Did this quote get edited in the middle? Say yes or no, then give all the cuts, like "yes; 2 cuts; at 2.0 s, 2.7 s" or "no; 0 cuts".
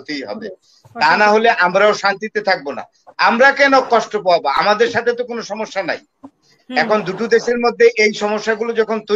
no; 0 cuts